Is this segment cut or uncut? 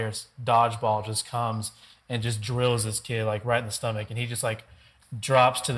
uncut